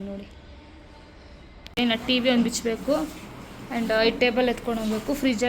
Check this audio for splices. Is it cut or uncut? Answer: cut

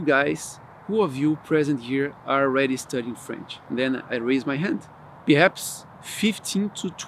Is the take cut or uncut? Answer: uncut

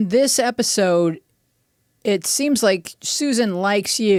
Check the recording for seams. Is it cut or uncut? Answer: uncut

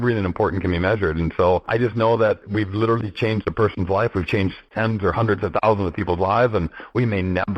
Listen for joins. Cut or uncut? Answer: cut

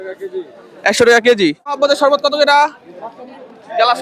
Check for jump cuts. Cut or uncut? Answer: cut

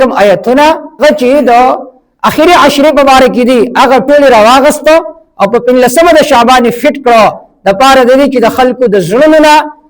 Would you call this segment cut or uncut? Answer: cut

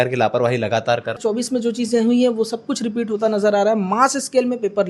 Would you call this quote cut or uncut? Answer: cut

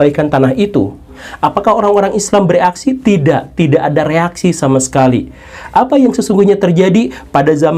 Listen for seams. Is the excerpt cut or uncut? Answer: cut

